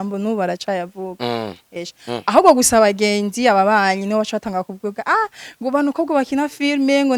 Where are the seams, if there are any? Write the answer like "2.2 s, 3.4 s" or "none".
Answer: 1.8 s